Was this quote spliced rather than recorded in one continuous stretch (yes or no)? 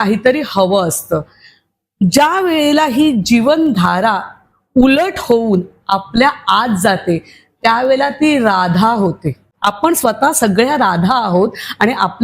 yes